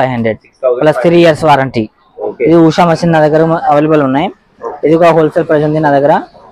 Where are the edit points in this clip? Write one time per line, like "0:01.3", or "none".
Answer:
0:02.2